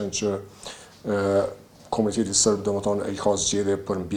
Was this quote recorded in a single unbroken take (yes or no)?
yes